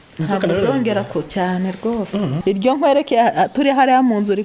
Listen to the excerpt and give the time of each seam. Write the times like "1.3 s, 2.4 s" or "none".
2.4 s